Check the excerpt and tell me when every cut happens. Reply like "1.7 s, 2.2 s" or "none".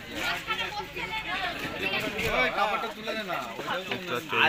none

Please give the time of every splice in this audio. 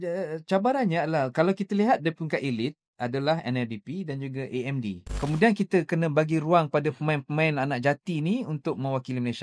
5.0 s

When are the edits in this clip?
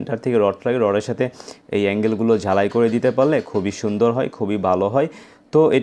none

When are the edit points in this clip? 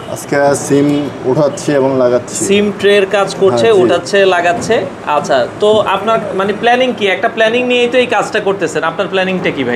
none

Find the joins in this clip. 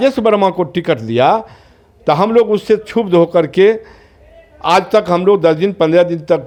none

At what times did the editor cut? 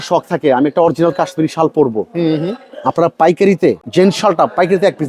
3.8 s

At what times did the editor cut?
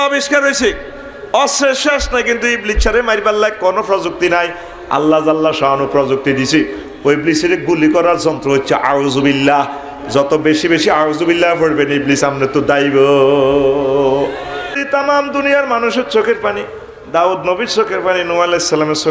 14.7 s

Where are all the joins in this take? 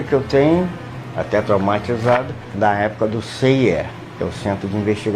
2.5 s, 4.0 s

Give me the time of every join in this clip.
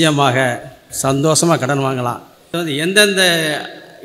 2.5 s

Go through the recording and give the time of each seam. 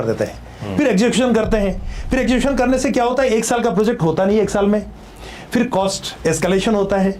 none

